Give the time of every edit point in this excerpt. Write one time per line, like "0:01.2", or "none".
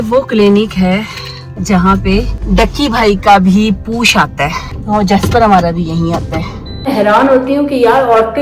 0:01.5
0:02.4
0:04.7
0:06.9